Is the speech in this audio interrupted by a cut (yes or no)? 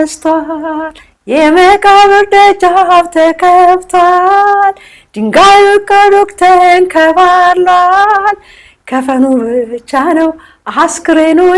no